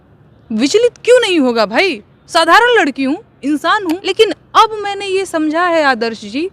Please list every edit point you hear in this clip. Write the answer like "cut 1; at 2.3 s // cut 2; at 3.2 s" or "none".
cut 1; at 4.0 s

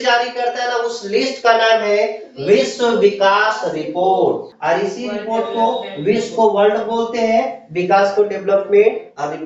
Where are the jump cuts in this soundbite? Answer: cut 1; at 4.5 s

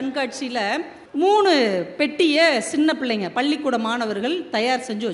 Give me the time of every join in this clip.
cut 1; at 1.0 s

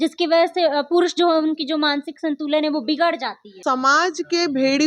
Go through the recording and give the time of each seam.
cut 1; at 3.6 s

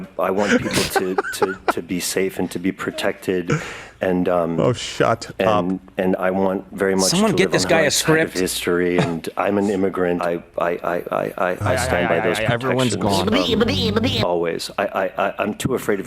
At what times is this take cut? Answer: cut 1; at 10.2 s

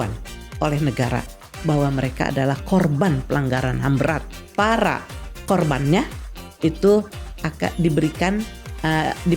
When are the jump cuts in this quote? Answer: cut 1; at 4.4 s

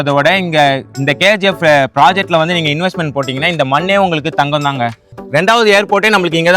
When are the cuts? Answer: cut 1; at 5.1 s

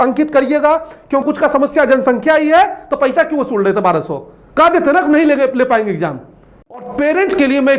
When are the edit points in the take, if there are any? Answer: cut 1; at 1.2 s // cut 2; at 6.8 s

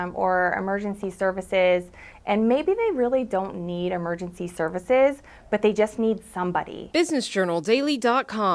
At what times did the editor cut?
cut 1; at 6.8 s

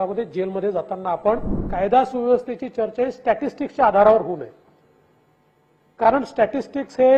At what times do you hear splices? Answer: cut 1; at 1.6 s

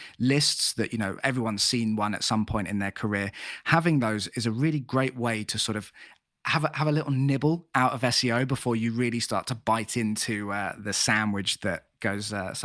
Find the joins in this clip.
cut 1; at 10.8 s

